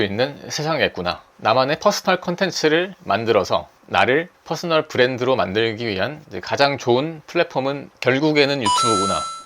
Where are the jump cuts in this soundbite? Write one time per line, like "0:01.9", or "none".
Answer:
0:01.3
0:07.9